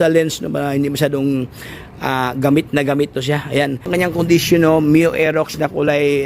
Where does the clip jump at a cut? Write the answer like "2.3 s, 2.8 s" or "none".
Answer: 3.9 s